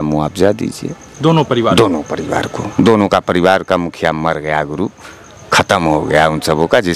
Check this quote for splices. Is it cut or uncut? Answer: uncut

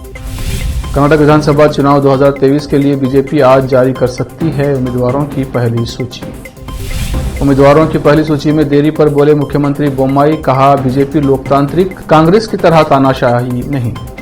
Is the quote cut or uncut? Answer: uncut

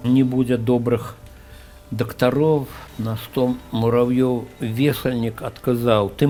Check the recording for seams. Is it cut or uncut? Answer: uncut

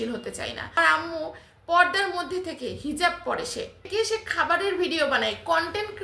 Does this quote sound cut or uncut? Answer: cut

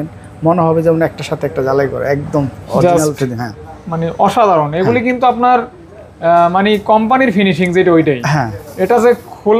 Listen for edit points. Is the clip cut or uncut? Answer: uncut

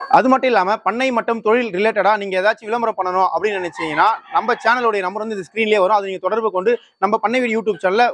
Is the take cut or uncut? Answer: uncut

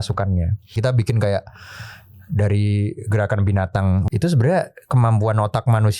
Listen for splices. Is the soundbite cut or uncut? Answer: cut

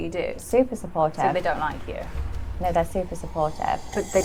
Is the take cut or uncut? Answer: uncut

